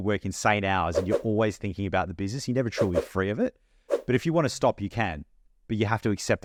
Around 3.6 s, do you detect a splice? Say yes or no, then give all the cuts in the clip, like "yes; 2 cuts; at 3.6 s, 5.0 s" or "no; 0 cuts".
no; 0 cuts